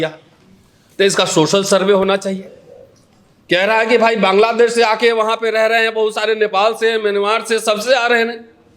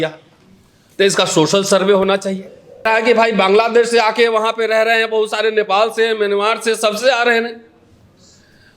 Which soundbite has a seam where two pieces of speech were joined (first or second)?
second